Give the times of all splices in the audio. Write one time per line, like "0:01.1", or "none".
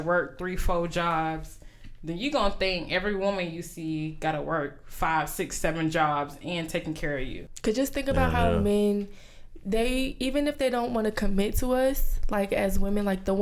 0:07.4

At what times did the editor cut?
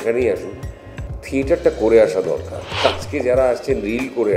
0:02.6

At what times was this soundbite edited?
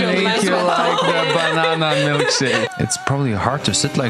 0:02.7

